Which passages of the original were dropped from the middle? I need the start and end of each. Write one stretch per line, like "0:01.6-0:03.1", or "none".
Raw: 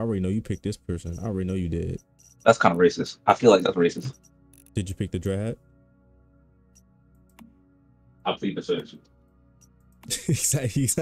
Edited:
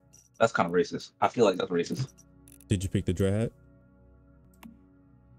0:06.5-0:07.2